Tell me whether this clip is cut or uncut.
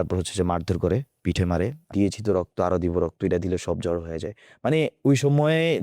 cut